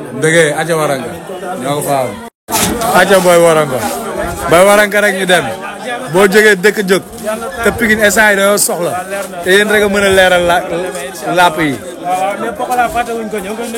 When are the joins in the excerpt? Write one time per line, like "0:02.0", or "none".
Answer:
0:02.4